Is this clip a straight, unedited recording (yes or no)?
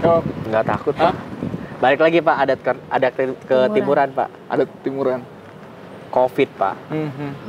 yes